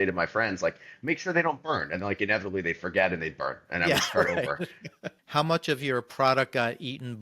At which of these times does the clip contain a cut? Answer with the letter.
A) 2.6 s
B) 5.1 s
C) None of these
B